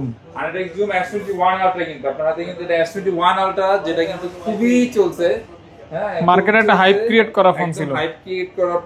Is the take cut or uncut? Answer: uncut